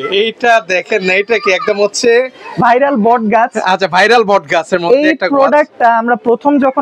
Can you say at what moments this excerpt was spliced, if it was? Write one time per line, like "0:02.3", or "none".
none